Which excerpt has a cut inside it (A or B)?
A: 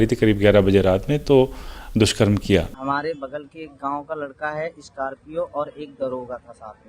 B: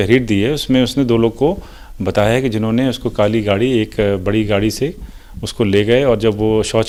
A